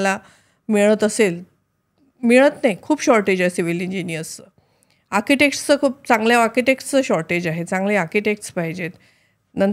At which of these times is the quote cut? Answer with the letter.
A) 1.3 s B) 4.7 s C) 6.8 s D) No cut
D